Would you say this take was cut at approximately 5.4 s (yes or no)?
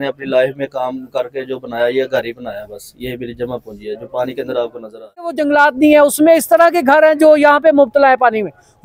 yes